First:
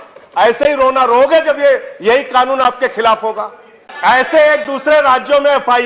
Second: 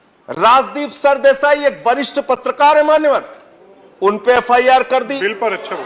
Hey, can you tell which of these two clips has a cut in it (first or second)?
first